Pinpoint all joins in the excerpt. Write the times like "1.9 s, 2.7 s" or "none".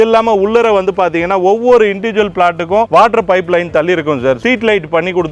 4.4 s